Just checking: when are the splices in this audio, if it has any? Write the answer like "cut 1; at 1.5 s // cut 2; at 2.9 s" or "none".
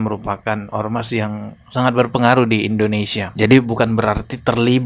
none